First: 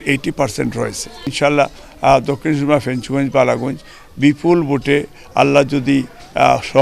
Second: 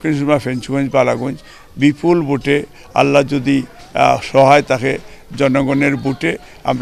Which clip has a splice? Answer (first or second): first